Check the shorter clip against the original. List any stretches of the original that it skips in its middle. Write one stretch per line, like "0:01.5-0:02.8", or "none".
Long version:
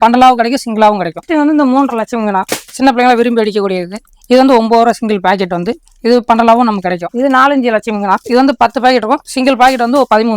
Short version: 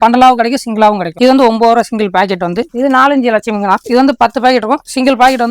0:01.1-0:04.2
0:05.8-0:07.1